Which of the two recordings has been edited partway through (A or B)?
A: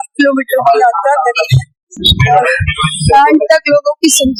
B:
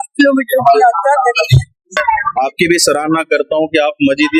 B